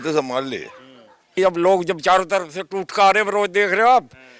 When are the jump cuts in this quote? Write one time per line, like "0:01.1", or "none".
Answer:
0:01.3